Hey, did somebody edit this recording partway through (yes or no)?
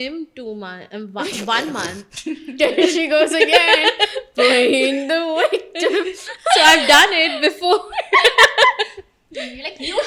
no